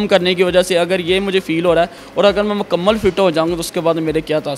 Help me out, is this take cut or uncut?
uncut